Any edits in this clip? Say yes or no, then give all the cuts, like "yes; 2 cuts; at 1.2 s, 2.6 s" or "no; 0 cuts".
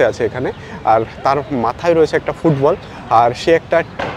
no; 0 cuts